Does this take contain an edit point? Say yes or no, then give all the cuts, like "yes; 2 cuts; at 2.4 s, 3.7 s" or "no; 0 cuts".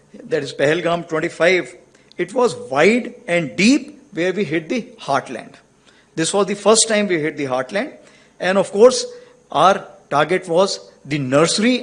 no; 0 cuts